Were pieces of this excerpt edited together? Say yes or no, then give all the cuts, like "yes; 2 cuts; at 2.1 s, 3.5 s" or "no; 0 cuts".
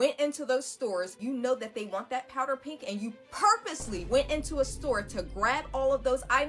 yes; 1 cut; at 1.2 s